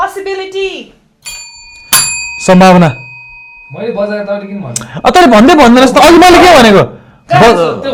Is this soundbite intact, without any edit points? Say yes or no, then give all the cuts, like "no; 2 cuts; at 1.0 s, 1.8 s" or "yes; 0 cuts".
yes; 0 cuts